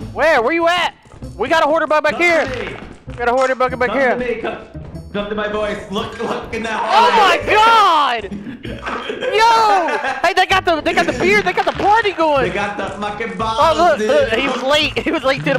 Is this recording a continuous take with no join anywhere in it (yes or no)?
yes